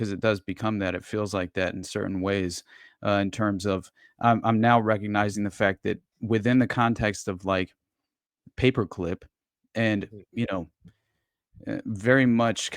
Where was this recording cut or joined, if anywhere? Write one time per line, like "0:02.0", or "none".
none